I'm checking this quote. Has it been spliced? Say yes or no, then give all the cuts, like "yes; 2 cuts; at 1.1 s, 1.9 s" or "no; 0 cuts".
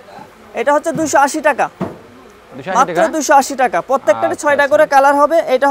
no; 0 cuts